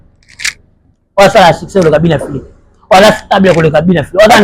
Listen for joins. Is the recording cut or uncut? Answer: uncut